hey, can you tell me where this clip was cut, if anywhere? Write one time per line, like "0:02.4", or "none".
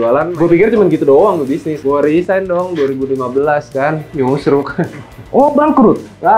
none